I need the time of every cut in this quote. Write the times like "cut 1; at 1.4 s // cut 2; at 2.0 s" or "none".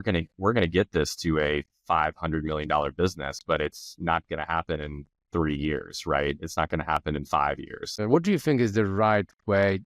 cut 1; at 8.0 s